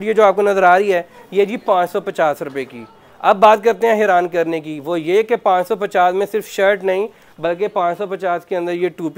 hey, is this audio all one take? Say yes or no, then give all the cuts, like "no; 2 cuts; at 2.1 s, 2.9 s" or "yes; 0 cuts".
yes; 0 cuts